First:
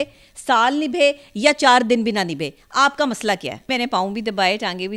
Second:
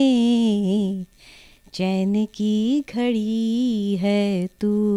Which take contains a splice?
first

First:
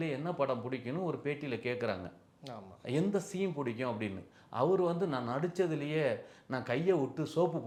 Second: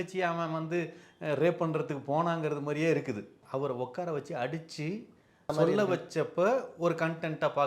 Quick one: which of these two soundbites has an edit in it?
second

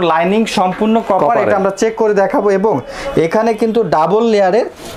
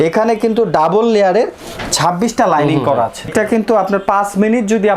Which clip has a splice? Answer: second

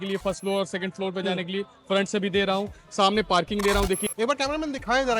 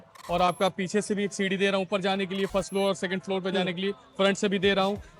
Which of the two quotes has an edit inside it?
first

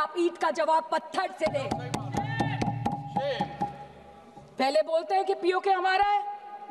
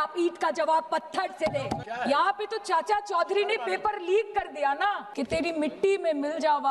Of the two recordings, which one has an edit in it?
second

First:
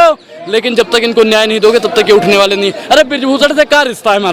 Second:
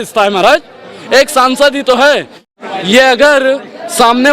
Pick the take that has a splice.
second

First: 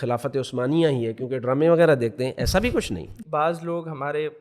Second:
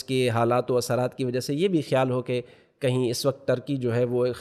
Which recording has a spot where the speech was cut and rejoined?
first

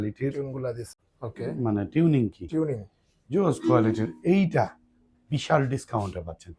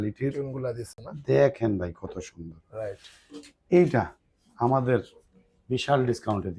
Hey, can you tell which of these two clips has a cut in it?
first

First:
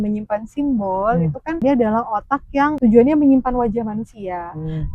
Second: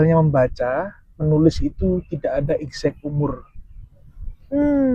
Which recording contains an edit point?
first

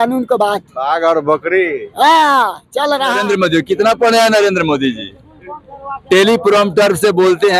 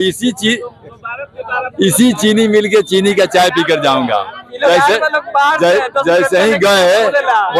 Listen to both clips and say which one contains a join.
first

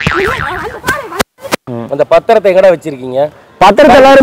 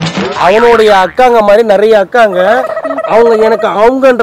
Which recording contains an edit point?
first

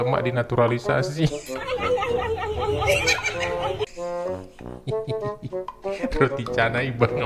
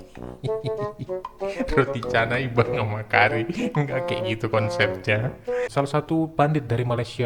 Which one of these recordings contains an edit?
second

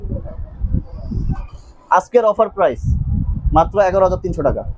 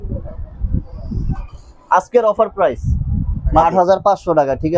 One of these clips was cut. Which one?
second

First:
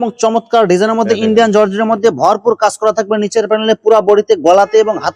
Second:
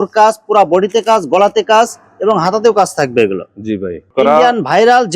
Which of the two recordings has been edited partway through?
second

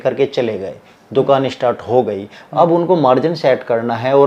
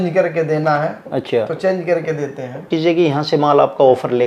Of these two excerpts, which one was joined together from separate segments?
second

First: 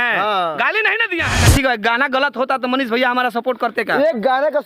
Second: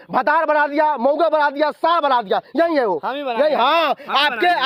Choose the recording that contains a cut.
first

